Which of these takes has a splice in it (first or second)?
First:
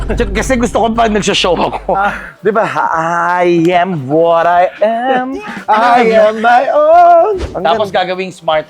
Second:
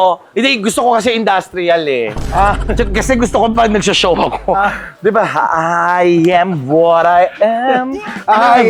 first